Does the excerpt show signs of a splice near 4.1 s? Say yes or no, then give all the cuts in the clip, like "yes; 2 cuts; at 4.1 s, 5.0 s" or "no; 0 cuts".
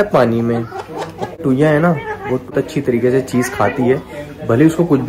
no; 2 cuts; at 1.4 s, 2.5 s